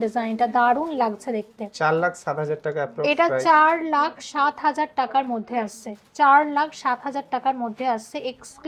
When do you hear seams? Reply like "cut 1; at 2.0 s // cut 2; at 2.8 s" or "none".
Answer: none